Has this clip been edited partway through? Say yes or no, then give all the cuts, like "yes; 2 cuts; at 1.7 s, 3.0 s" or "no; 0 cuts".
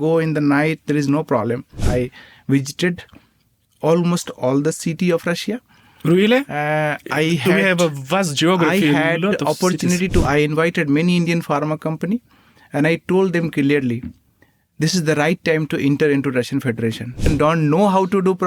yes; 3 cuts; at 1.8 s, 10.2 s, 17.3 s